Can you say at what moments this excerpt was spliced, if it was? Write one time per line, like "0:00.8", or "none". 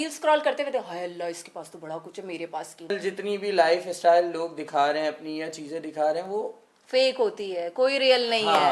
0:03.0

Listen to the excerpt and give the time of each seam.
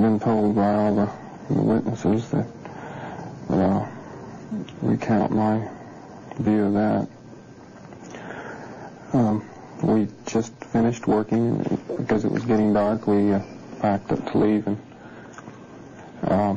none

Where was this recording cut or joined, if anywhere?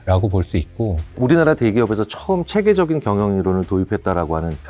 0:01.0

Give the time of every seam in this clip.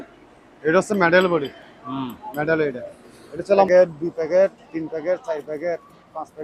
0:03.7

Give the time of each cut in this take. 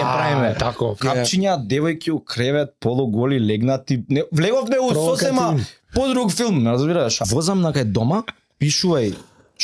0:01.0
0:07.2

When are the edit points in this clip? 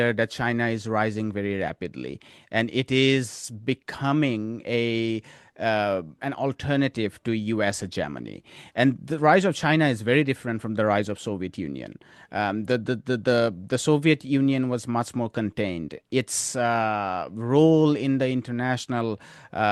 none

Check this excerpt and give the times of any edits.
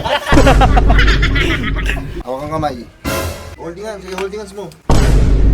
0:02.1
0:03.5

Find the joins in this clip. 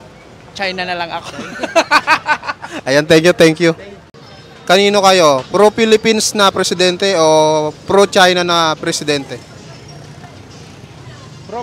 0:04.1

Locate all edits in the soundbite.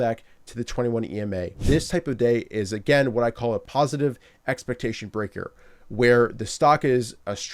0:01.6
0:03.7

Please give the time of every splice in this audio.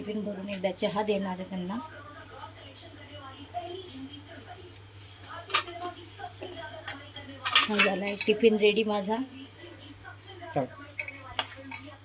none

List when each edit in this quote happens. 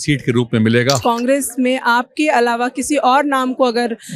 0:01.0

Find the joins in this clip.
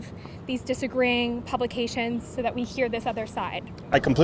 none

